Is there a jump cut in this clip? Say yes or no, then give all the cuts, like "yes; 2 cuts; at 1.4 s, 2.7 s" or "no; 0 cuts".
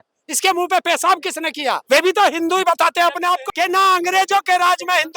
yes; 2 cuts; at 1.8 s, 3.4 s